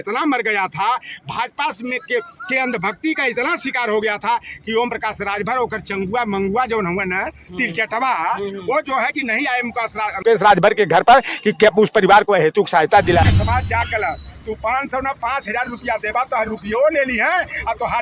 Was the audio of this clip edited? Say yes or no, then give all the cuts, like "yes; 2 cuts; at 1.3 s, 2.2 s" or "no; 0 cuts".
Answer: yes; 1 cut; at 13.2 s